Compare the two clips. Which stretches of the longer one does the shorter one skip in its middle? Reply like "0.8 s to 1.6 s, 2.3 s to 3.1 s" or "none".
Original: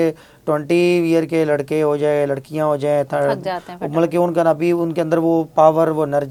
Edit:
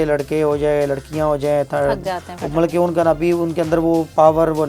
none